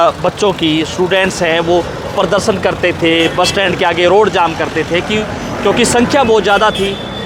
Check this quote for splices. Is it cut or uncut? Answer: uncut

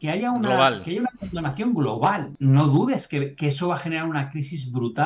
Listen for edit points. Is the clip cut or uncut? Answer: cut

